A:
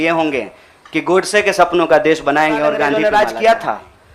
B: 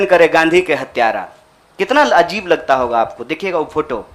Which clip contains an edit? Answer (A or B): A